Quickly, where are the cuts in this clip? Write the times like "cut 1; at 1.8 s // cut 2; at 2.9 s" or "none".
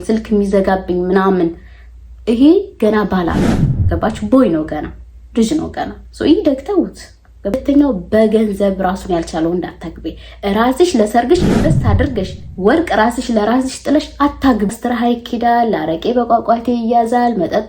cut 1; at 7.6 s // cut 2; at 14.8 s